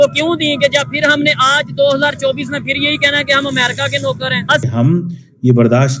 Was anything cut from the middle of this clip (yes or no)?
yes